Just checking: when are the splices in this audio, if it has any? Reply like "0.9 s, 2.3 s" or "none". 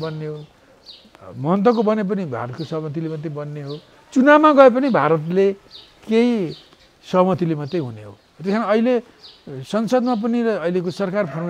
none